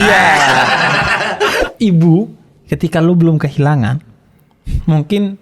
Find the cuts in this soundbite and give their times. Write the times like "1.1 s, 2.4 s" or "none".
1.6 s